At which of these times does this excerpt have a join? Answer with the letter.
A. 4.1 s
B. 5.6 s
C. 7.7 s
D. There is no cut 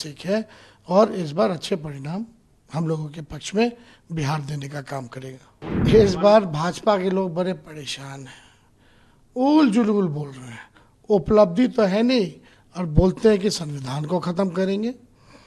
B